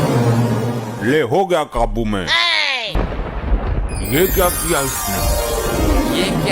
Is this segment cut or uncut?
cut